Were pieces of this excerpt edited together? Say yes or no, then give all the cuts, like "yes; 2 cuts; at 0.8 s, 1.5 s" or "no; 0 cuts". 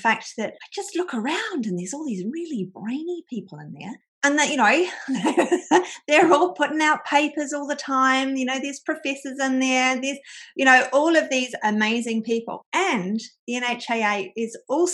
no; 0 cuts